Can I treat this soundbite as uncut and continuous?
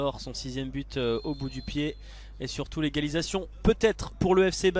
yes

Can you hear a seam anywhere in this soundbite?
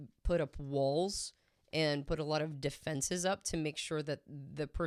no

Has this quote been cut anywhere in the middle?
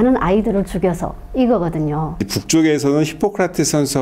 yes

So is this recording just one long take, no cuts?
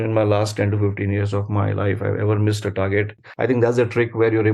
no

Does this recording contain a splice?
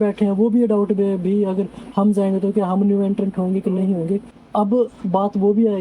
yes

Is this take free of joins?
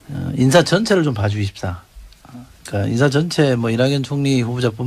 yes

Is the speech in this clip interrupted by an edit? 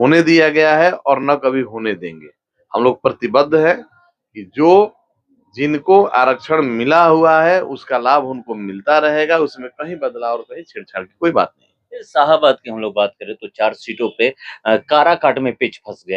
no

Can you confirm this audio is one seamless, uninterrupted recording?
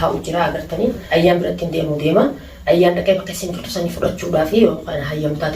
no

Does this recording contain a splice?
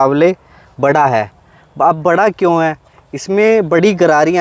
no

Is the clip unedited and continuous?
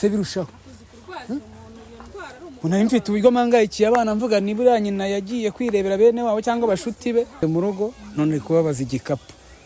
no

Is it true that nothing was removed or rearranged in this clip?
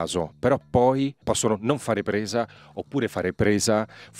no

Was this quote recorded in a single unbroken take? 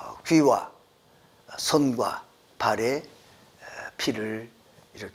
yes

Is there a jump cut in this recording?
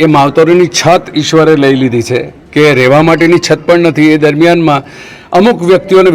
no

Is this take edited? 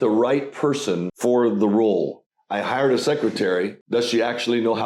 yes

